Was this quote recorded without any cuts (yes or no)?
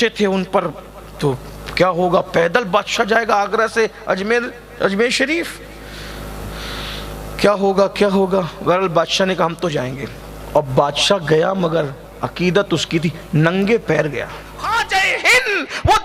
no